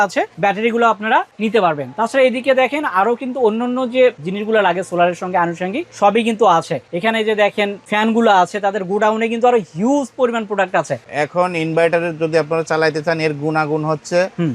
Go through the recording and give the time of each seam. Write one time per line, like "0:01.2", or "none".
none